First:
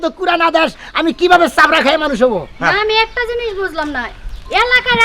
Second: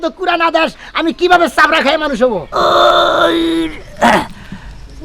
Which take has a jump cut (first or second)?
second